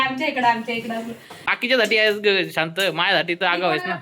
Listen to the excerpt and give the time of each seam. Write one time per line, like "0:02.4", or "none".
0:01.5